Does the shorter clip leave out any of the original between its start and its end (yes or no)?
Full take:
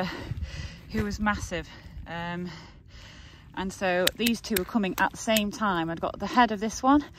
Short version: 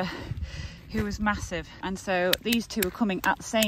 yes